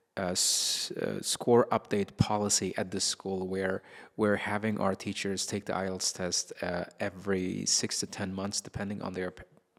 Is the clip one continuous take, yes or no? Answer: yes